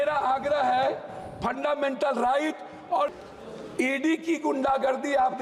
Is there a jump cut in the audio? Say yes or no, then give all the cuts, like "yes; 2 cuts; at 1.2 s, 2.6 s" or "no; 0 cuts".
yes; 1 cut; at 3.1 s